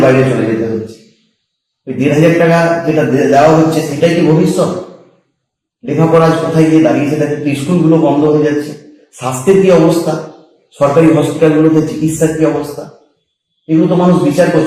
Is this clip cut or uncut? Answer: uncut